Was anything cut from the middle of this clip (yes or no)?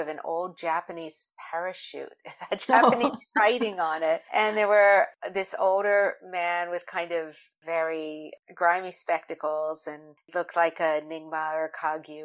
yes